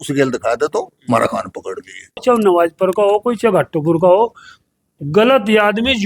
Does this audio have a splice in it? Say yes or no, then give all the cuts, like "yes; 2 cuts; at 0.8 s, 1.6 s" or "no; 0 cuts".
yes; 1 cut; at 2.2 s